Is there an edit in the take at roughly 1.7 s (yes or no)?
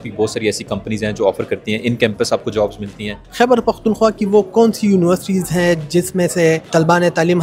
no